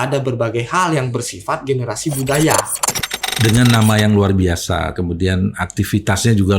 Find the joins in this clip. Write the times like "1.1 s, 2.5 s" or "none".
2.8 s